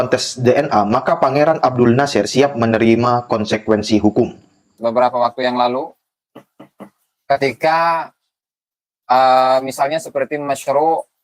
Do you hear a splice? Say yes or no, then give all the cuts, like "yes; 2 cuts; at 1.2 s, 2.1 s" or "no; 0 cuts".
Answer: yes; 1 cut; at 4.7 s